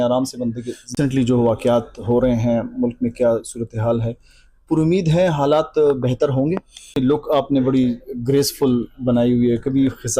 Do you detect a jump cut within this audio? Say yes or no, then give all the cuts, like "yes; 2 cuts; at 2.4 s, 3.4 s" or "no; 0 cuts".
yes; 2 cuts; at 0.9 s, 7.0 s